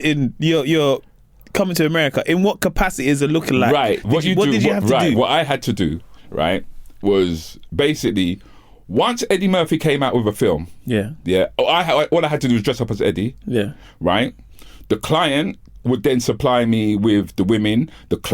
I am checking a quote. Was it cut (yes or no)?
no